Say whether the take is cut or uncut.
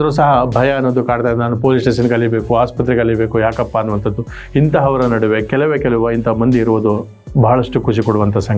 uncut